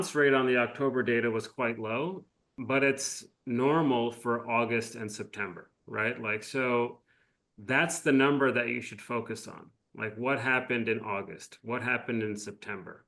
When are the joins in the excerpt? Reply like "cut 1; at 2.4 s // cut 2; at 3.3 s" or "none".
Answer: cut 1; at 2.6 s